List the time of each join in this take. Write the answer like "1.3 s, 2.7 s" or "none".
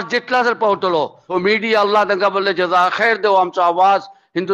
1.2 s